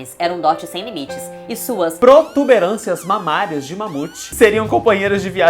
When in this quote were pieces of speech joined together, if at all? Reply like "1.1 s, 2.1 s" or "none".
4.3 s